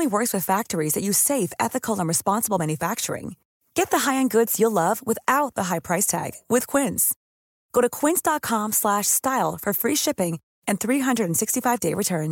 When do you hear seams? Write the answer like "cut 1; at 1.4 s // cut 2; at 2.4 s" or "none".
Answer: none

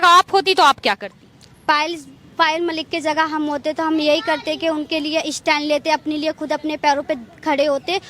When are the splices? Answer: none

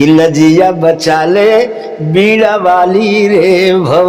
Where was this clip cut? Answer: none

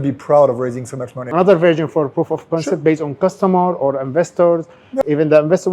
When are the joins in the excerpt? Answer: cut 1; at 1.1 s // cut 2; at 4.8 s

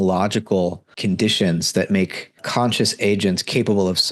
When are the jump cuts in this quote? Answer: cut 1; at 0.9 s // cut 2; at 2.4 s

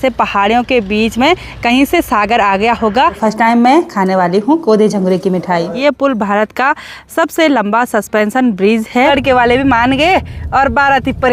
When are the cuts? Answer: cut 1; at 3.2 s // cut 2; at 5.7 s // cut 3; at 9.1 s

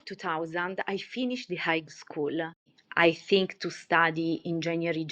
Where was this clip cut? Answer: cut 1; at 2.7 s

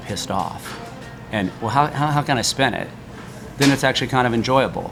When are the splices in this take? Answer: none

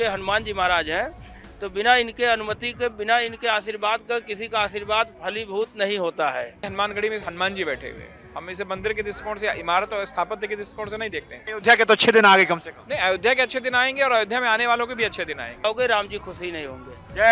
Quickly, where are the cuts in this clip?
cut 1; at 6.6 s // cut 2; at 11.4 s // cut 3; at 15.6 s

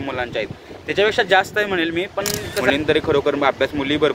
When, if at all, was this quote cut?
cut 1; at 2.7 s

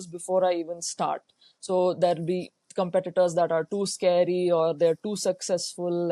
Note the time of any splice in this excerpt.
none

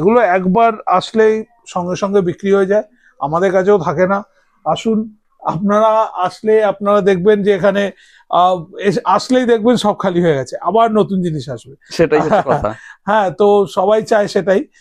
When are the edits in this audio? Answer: none

